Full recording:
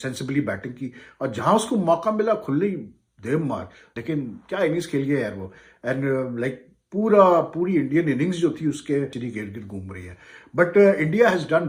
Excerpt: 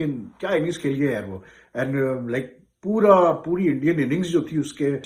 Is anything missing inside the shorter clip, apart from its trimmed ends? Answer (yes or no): no